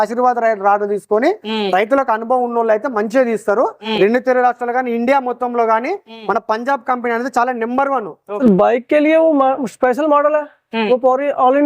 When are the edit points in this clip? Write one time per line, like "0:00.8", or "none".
0:03.9
0:08.3